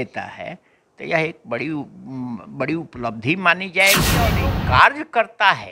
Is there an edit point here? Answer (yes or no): yes